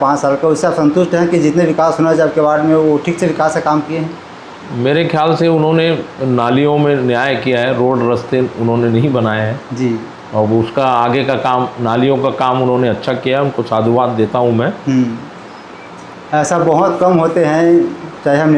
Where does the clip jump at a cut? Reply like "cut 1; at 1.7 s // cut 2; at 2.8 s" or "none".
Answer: none